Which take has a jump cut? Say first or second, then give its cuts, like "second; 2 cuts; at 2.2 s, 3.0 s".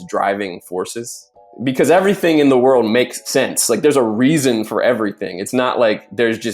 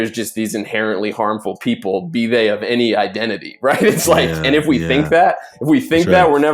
first; 2 cuts; at 1.5 s, 3.2 s